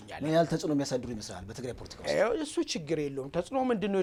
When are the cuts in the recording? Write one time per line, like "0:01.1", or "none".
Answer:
none